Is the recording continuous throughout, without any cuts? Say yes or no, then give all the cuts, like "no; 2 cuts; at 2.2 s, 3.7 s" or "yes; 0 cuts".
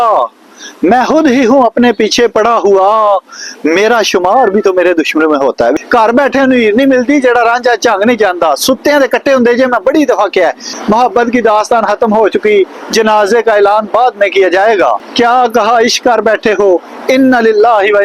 no; 2 cuts; at 5.8 s, 10.7 s